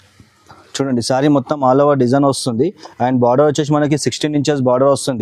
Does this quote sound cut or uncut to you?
uncut